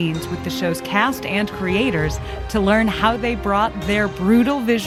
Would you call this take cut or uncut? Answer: uncut